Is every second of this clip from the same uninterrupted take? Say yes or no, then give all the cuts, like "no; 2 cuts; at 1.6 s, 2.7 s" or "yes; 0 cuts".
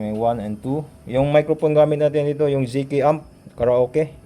yes; 0 cuts